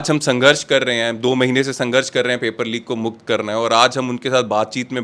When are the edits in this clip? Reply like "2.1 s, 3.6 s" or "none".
none